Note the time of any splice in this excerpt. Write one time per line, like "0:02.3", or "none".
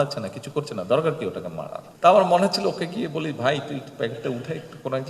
0:01.8

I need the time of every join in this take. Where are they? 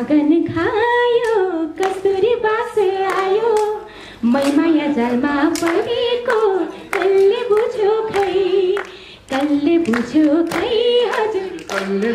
none

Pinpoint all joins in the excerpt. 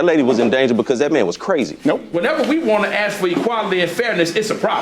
0:02.7

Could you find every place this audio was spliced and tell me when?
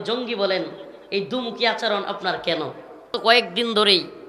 0:03.1

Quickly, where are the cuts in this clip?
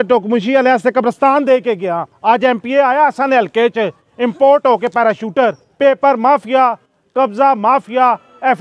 0:02.1
0:05.6

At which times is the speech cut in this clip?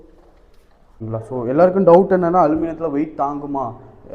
0:01.0

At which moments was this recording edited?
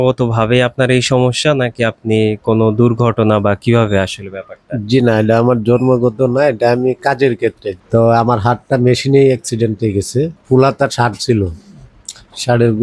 0:07.7
0:10.4

